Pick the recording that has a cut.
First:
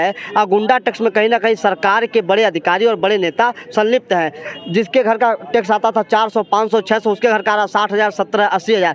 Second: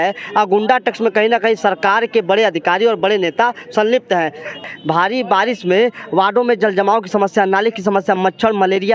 second; 1 cut; at 4.6 s

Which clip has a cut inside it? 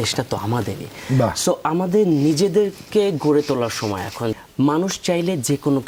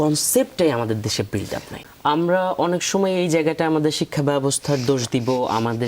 second; 1 cut; at 1.8 s

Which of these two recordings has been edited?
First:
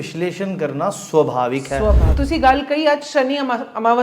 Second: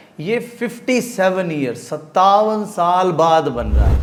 first; 1 cut; at 2.1 s

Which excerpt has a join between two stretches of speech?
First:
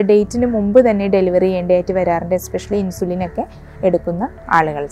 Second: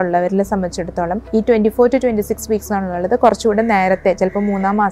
second; 1 cut; at 1.2 s

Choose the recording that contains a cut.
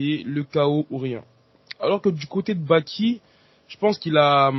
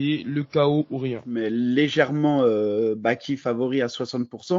second; 1 cut; at 1.3 s

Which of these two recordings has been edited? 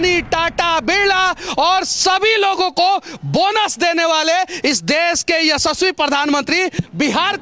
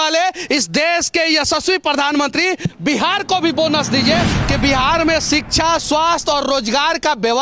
second; 1 cut; at 4.3 s

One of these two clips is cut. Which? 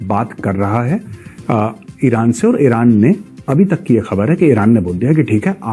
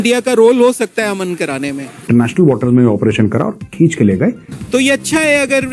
second; 2 cuts; at 2.1 s, 4.5 s

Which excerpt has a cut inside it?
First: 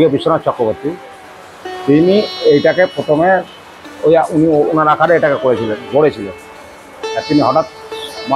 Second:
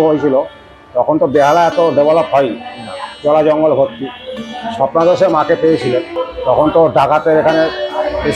second; 1 cut; at 6.2 s

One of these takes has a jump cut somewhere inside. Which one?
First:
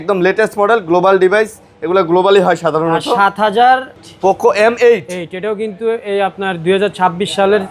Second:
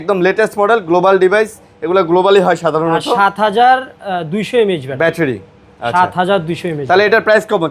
first; 1 cut; at 4.0 s

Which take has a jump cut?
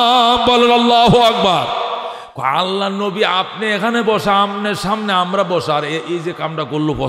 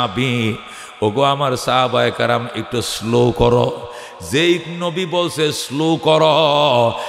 first; 1 cut; at 2.0 s

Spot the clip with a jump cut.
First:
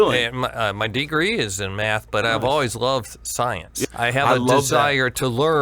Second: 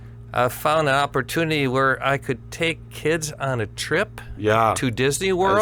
first; 1 cut; at 3.8 s

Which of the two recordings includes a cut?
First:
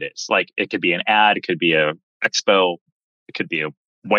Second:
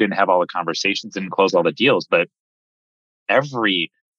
first; 1 cut; at 1.4 s

